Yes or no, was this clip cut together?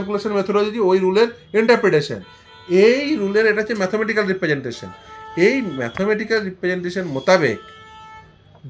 no